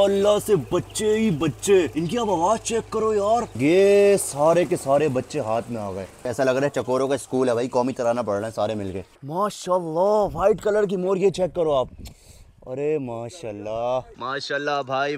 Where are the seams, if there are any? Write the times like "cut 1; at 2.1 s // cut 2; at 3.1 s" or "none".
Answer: cut 1; at 3.5 s // cut 2; at 6.3 s // cut 3; at 9.2 s // cut 4; at 14.1 s